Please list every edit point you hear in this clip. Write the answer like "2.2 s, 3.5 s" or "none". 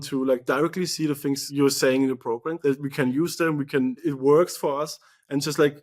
1.5 s, 2.5 s, 4.0 s

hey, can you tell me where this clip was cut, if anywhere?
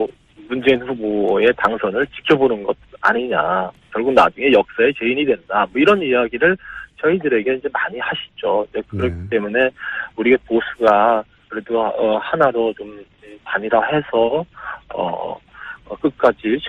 9.9 s

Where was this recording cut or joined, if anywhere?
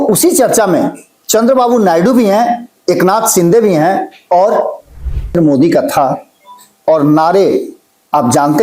5.3 s

